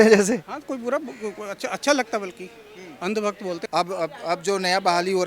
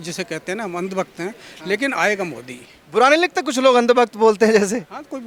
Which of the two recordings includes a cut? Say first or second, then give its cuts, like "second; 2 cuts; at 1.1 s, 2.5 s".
first; 1 cut; at 3.6 s